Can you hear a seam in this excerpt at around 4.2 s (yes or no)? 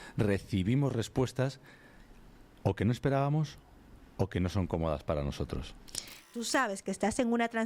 no